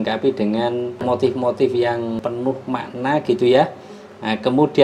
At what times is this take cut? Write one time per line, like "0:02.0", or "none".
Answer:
0:01.0
0:02.2

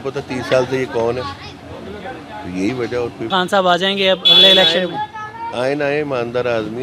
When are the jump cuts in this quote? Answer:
0:03.3

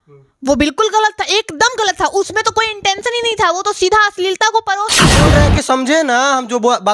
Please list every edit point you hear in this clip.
0:05.3

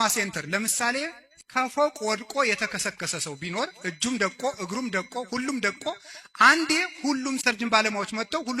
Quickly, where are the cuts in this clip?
0:01.3
0:07.4

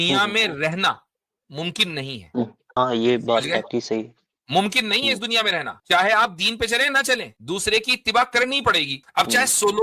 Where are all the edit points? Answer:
0:02.8
0:05.7
0:07.3
0:09.0

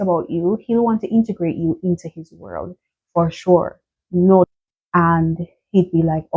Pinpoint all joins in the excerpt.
0:04.5

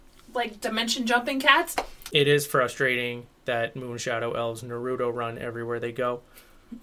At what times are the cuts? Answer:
0:02.0

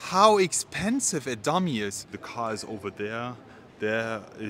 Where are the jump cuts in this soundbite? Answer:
0:02.2

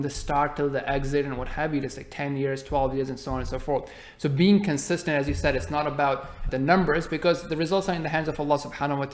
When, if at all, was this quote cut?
0:06.4

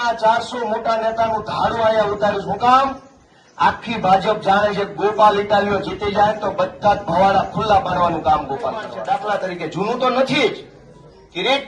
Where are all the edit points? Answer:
0:08.9

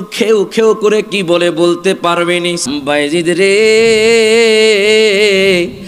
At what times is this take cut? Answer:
0:02.6

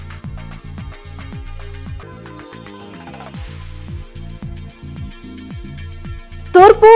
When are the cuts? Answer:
0:04.6

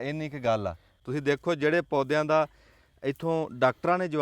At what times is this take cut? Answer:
0:01.0

